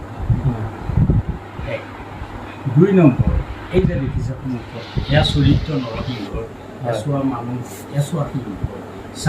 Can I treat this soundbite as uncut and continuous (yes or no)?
yes